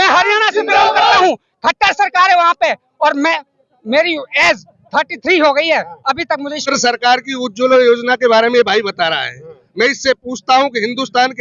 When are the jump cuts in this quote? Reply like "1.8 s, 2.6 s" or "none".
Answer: 6.6 s

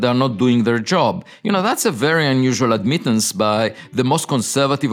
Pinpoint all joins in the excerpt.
none

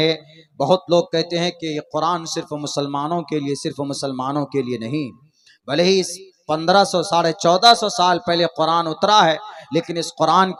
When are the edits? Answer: none

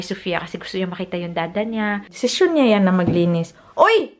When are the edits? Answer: 2.1 s

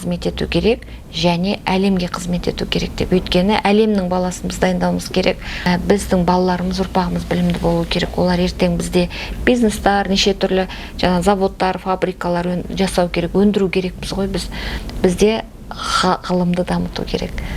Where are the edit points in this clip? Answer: none

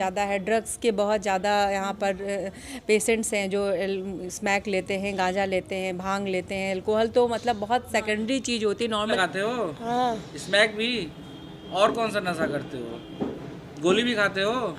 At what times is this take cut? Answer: 9.2 s

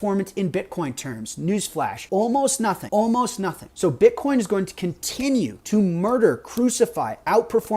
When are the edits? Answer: 2.0 s, 2.8 s, 3.6 s, 5.6 s

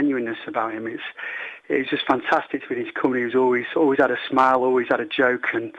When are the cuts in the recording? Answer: none

